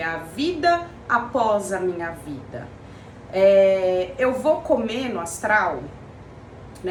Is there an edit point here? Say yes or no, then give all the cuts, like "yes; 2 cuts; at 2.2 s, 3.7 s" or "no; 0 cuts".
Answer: no; 0 cuts